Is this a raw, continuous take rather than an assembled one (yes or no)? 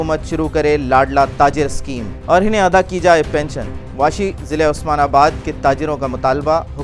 yes